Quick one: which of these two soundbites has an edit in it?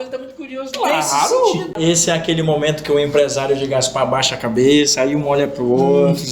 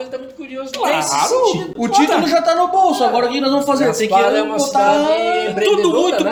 first; 1 cut; at 1.7 s

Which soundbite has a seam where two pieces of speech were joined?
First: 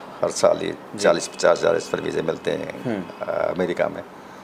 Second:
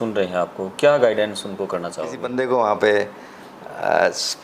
second; 1 cut; at 2.2 s

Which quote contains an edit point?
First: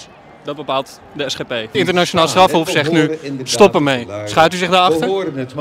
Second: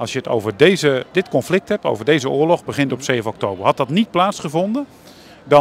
first; 1 cut; at 1.7 s

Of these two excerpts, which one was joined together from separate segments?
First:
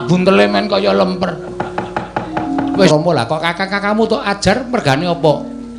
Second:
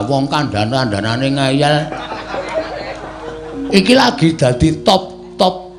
first; 1 cut; at 2.9 s

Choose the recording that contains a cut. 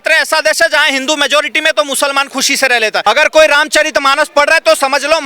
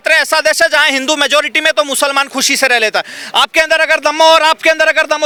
first; 1 cut; at 3.0 s

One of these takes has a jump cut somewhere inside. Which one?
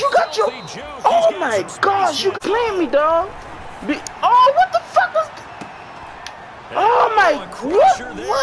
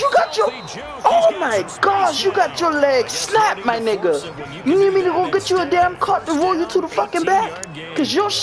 first; 1 cut; at 2.4 s

